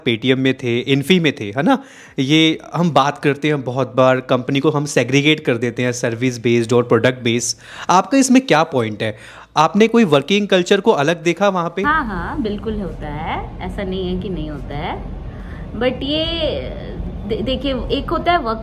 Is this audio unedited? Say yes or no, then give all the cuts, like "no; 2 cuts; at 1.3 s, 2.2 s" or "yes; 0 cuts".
yes; 0 cuts